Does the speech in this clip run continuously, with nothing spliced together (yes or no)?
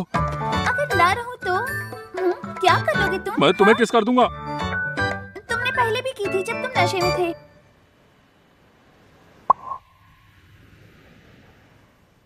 yes